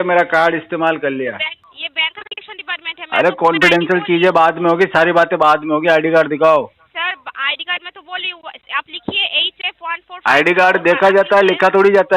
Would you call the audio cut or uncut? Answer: cut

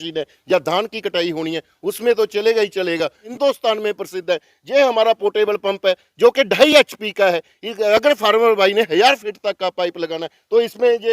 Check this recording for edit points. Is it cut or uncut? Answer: cut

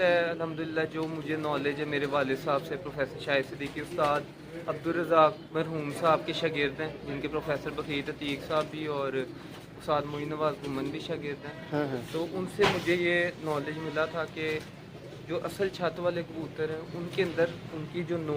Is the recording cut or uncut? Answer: uncut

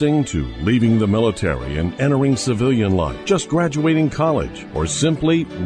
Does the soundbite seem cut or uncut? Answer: uncut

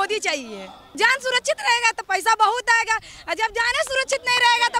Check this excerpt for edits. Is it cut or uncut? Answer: cut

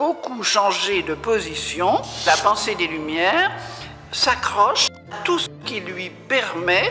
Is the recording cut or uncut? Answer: cut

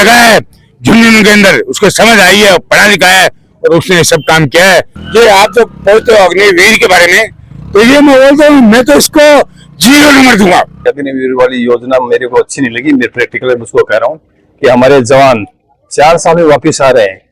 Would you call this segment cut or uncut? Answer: cut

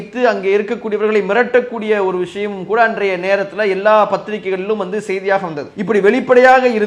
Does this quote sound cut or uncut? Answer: uncut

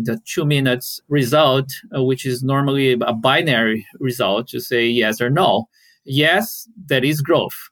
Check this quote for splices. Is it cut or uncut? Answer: uncut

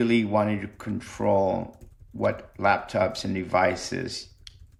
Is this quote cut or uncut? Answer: uncut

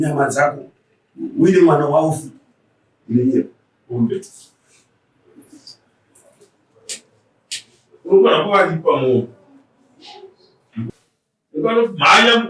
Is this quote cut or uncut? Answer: cut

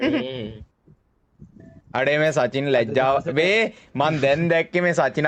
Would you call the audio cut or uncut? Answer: uncut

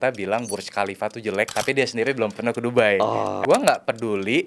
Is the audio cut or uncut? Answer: cut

